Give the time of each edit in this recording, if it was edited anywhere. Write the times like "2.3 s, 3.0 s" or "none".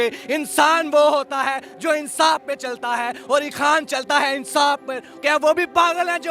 5.1 s